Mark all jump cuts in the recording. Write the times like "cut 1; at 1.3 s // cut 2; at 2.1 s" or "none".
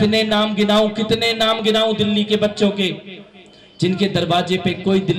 none